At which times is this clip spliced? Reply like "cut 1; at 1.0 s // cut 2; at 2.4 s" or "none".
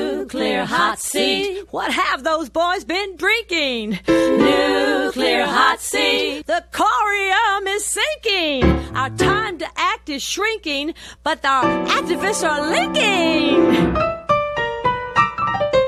none